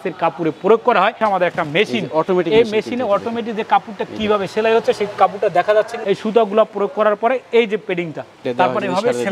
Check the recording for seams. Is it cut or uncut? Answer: cut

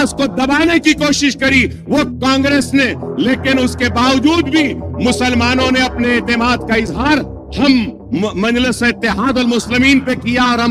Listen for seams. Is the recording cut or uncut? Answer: cut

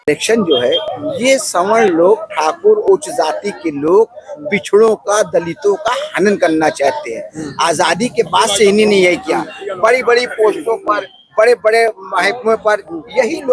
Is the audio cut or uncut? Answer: uncut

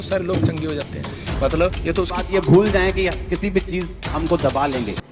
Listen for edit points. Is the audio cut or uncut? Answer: cut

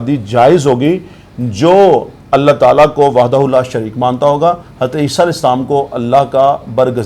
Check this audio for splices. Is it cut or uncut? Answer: uncut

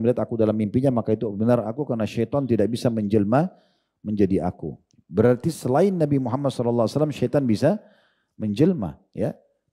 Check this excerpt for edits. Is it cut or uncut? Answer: uncut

